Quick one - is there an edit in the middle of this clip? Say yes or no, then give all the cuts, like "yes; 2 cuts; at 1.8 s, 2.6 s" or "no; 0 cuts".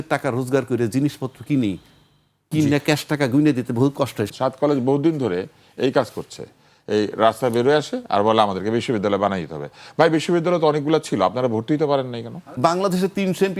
yes; 2 cuts; at 4.3 s, 12.5 s